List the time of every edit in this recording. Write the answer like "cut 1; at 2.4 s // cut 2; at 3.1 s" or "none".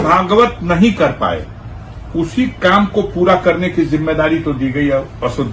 none